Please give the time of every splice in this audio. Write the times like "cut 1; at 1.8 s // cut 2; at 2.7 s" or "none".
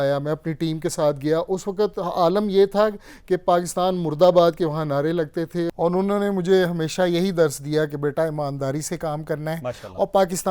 cut 1; at 5.7 s